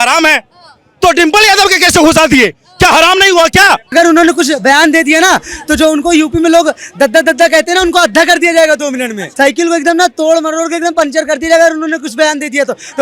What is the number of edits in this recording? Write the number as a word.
two